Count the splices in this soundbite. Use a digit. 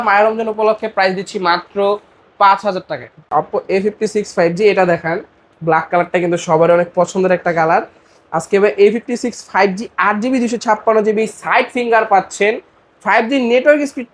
1